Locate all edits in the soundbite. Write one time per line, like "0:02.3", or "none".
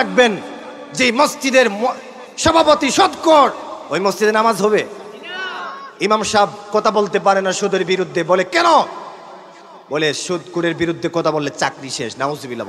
none